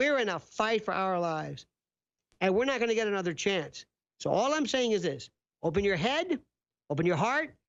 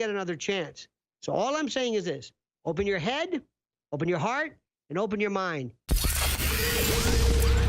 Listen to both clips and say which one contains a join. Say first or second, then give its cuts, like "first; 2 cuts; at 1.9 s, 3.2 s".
second; 1 cut; at 5.8 s